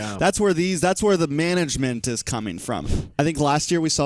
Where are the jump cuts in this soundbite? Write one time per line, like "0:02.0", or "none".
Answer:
0:02.8